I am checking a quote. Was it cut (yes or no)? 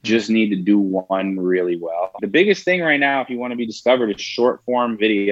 yes